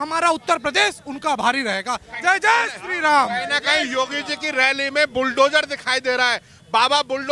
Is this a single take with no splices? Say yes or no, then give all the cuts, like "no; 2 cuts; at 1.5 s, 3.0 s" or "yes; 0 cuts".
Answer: yes; 0 cuts